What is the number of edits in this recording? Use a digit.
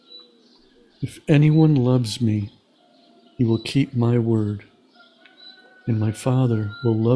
1